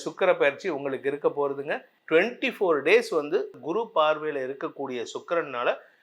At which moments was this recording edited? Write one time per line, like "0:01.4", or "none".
0:01.9
0:03.6